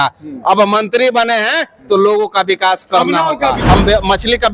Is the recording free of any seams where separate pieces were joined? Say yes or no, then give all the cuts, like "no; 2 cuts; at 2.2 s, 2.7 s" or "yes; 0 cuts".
no; 1 cut; at 3.6 s